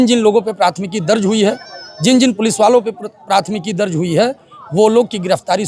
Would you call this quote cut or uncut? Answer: uncut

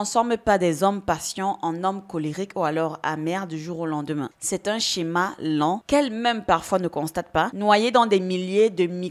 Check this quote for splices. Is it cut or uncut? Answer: uncut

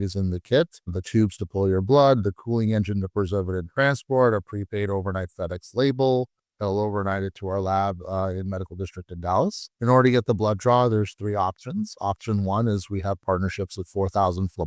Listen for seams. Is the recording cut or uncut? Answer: uncut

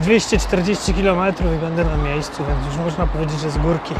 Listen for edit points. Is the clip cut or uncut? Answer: uncut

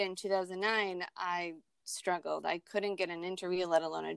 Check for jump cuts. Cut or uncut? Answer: uncut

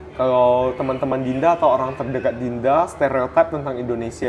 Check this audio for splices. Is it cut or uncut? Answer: uncut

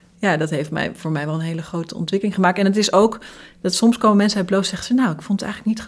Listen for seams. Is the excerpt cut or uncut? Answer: uncut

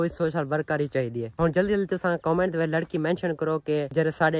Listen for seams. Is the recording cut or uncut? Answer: cut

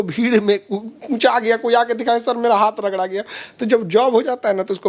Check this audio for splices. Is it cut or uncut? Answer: uncut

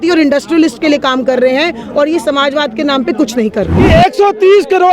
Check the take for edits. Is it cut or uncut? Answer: cut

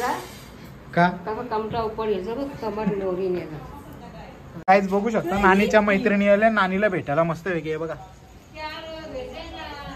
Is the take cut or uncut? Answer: cut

